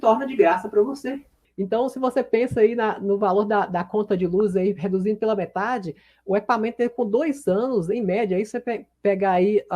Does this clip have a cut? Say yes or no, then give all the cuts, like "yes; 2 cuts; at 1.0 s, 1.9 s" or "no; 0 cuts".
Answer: yes; 1 cut; at 1.6 s